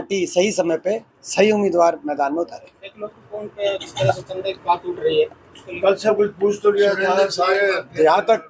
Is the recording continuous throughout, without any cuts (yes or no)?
yes